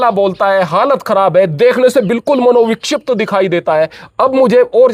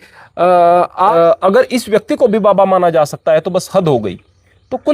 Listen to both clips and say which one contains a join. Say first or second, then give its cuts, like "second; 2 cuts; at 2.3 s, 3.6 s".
second; 1 cut; at 1.1 s